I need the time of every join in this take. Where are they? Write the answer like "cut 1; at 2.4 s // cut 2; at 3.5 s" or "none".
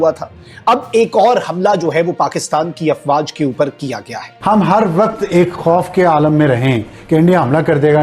cut 1; at 4.3 s